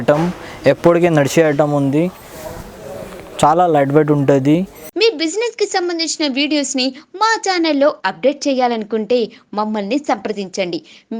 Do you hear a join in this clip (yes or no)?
yes